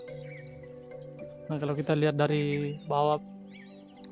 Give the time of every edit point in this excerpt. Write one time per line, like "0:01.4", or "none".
none